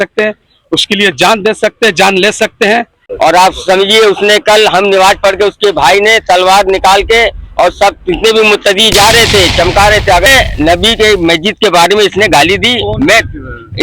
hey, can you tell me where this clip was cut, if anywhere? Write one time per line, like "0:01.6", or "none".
0:02.9
0:10.3

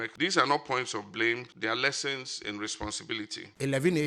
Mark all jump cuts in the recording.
0:01.5
0:03.1

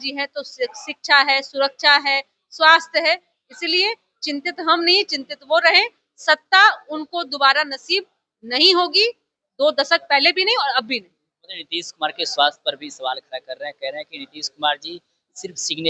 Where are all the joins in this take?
none

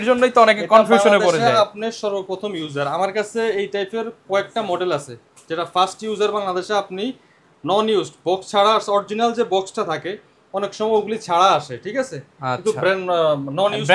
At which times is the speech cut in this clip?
none

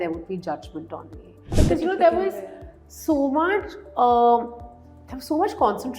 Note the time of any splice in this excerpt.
0:01.5

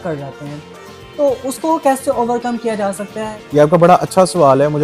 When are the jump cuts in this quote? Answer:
0:03.2

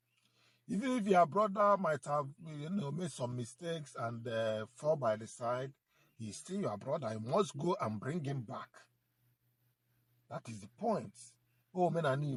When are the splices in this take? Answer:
none

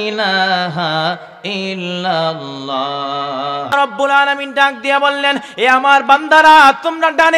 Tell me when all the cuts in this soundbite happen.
0:03.7

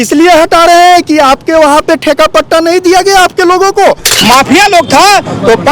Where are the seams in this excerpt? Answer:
0:04.1

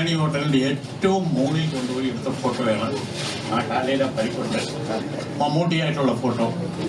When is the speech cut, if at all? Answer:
0:05.0

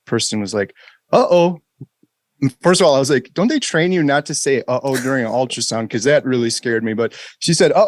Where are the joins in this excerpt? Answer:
none

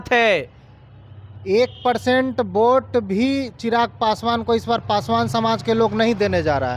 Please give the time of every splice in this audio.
none

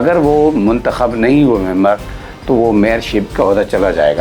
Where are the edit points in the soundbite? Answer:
0:03.3

